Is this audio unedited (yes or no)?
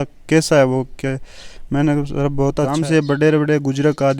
no